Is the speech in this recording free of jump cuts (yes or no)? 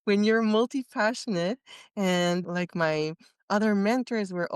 no